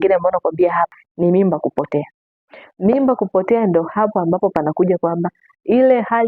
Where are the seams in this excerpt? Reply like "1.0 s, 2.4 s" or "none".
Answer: 1.0 s